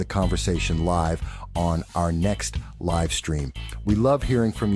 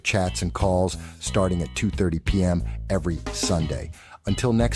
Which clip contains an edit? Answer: second; 1 cut; at 1.7 s

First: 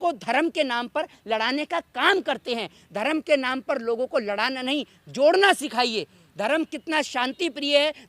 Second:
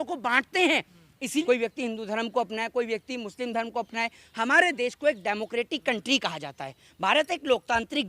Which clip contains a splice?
second; 1 cut; at 1.4 s

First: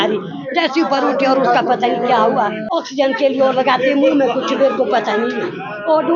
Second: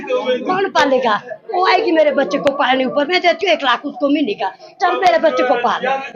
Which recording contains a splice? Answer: first; 1 cut; at 2.6 s

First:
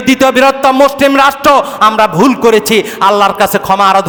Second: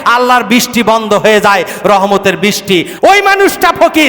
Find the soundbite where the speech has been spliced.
second; 1 cut; at 2.9 s

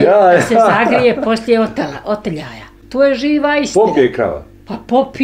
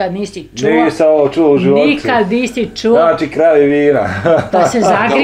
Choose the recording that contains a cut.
first; 1 cut; at 2.8 s

